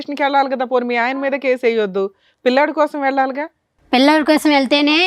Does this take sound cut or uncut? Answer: uncut